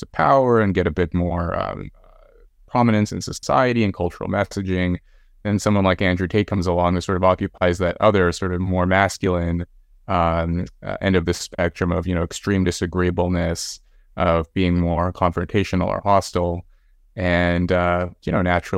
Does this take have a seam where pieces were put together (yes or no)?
no